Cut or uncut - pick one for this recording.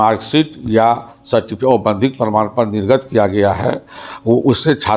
uncut